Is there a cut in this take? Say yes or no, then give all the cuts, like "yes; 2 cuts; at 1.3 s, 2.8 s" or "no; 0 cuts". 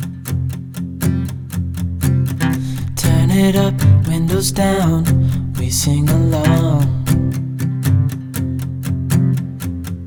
no; 0 cuts